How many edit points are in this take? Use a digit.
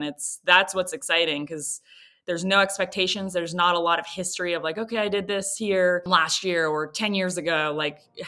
1